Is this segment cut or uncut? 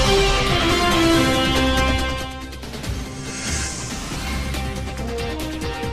uncut